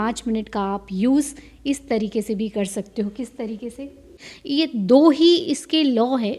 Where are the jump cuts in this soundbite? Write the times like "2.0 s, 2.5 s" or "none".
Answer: 4.3 s